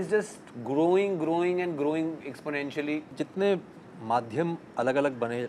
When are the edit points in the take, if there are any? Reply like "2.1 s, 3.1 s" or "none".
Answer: 3.1 s